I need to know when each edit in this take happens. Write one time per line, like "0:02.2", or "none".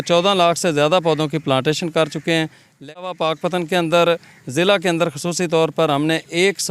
0:03.0